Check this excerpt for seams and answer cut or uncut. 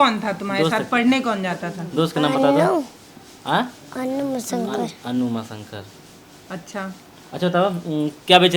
uncut